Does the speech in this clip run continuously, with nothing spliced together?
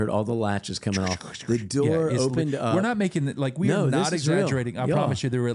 yes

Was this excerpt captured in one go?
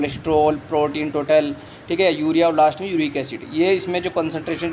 yes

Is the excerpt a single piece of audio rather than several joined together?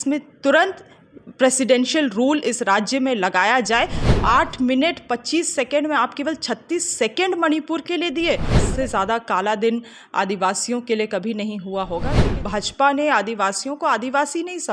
no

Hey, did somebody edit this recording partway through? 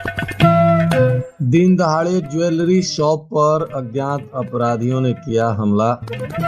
yes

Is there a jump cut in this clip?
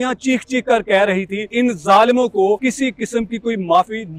yes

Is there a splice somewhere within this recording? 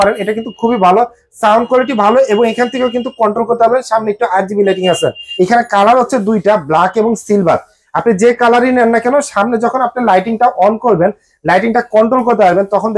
yes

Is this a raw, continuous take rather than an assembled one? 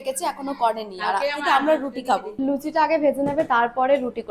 no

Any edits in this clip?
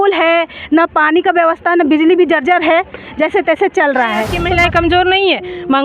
yes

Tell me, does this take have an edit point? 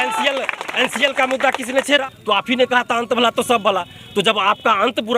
yes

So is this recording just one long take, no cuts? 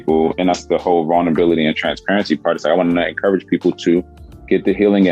yes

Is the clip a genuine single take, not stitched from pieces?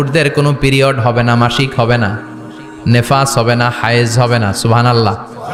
yes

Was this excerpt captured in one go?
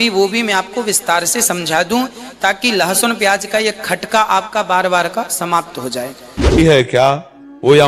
no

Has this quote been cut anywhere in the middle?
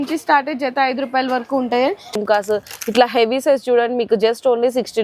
yes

